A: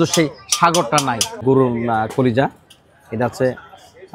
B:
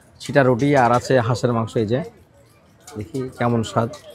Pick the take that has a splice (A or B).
A